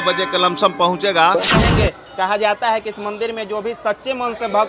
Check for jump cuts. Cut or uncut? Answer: cut